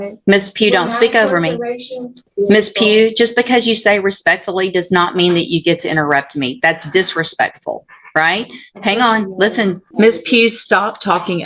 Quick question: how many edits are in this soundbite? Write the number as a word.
two